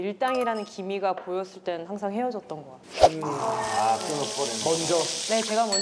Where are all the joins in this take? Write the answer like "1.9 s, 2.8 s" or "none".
none